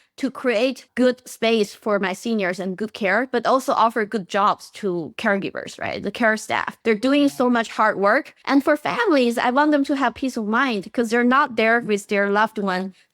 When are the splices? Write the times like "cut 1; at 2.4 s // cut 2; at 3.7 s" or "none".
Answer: cut 1; at 0.8 s // cut 2; at 6.7 s // cut 3; at 8.3 s